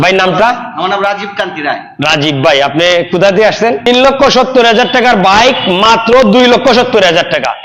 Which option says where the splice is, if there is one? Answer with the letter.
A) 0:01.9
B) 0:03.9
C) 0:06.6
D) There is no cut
B